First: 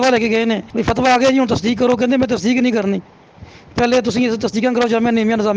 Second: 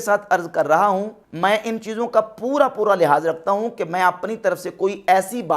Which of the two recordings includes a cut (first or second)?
second